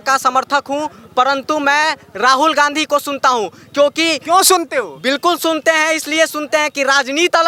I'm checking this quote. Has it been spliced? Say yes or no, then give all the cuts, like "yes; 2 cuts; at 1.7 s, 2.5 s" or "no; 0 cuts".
no; 0 cuts